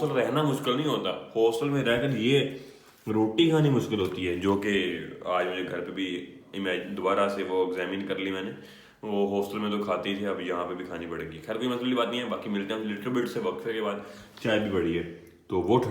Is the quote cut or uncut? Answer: uncut